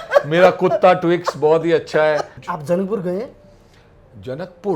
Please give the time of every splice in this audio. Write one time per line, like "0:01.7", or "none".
0:02.4